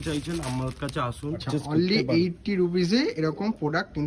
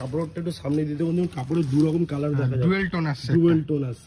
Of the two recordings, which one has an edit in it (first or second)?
first